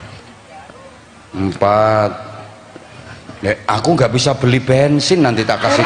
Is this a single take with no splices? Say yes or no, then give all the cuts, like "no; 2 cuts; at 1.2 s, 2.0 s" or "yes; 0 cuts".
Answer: yes; 0 cuts